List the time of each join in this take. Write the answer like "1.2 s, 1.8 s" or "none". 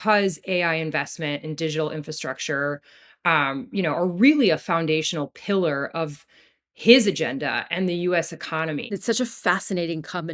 8.9 s